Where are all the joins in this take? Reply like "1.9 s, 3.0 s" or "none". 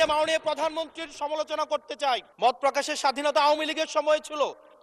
2.3 s